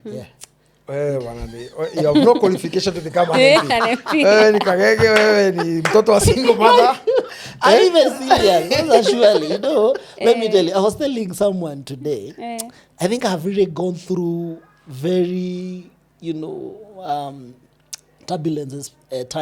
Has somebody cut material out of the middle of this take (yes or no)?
no